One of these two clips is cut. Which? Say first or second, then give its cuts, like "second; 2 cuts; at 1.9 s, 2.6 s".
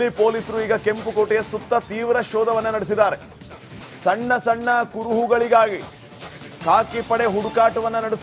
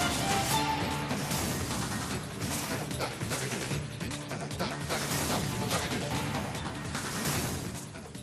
second; 1 cut; at 1.4 s